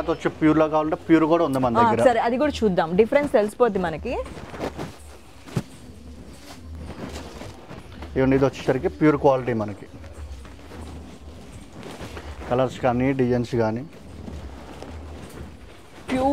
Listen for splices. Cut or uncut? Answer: uncut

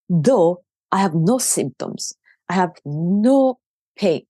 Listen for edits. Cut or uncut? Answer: uncut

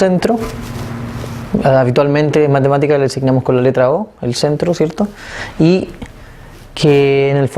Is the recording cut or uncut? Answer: cut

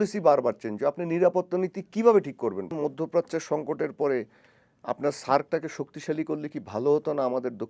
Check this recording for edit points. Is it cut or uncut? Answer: cut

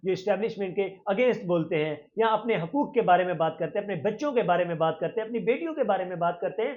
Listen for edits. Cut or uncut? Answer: uncut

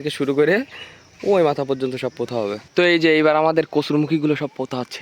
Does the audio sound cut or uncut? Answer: cut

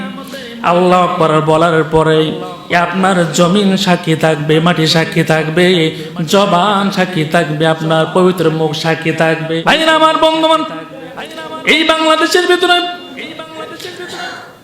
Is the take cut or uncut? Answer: cut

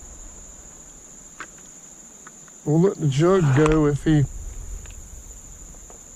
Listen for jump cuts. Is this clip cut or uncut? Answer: uncut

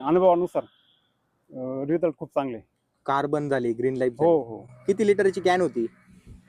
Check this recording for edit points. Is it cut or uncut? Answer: uncut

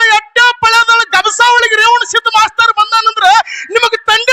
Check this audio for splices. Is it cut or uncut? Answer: uncut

